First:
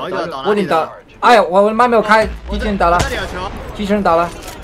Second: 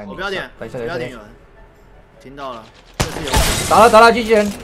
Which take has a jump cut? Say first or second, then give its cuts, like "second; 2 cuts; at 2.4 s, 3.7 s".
first; 1 cut; at 2.5 s